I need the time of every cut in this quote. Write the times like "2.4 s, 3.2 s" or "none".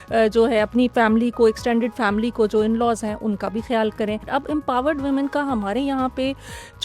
4.3 s